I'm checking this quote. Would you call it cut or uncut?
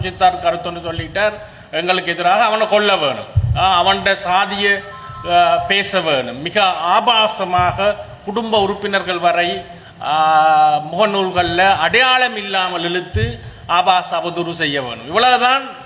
uncut